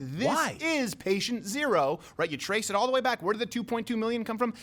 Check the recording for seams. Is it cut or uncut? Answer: uncut